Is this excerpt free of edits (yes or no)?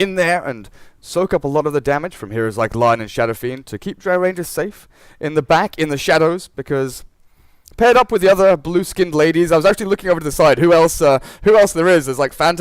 no